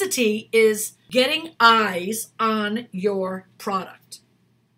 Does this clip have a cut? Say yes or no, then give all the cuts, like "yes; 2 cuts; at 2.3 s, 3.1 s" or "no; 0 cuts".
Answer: yes; 1 cut; at 0.9 s